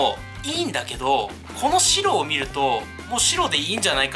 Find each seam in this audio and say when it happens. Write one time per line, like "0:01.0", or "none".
0:02.9